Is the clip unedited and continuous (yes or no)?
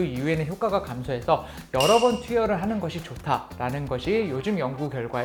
yes